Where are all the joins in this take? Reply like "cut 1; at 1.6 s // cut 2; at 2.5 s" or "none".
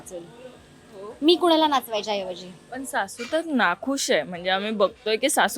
none